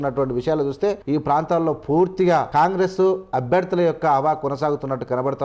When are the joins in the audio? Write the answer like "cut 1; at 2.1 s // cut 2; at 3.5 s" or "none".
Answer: cut 1; at 1.0 s // cut 2; at 2.5 s